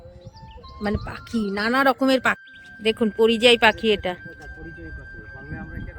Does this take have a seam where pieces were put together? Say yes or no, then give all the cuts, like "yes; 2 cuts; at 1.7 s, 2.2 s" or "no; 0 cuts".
yes; 1 cut; at 2.4 s